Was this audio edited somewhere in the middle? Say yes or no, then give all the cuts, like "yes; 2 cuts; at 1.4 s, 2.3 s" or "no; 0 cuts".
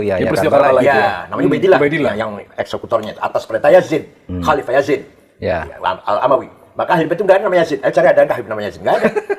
no; 0 cuts